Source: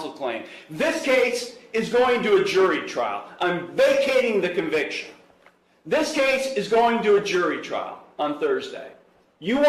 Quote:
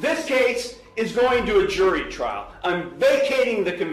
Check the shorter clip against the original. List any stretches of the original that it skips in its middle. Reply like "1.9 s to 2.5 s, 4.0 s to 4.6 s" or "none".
none